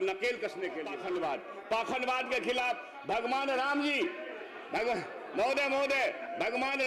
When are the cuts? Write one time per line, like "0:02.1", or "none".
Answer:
0:00.9